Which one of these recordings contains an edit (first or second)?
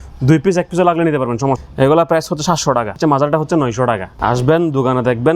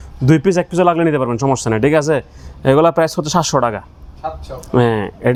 first